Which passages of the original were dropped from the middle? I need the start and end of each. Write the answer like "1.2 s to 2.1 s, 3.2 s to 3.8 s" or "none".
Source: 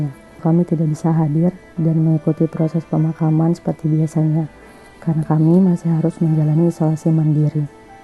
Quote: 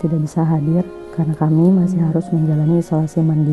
1.7 s to 4.9 s